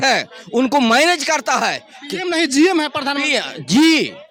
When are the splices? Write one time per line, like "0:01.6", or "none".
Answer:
none